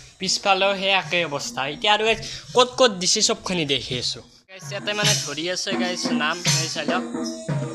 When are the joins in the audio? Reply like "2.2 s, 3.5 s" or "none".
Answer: 4.7 s